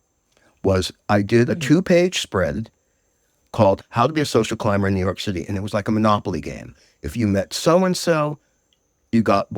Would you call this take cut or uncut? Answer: cut